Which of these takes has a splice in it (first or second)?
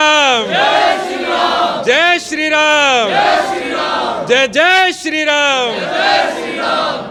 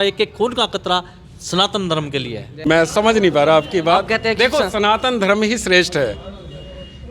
second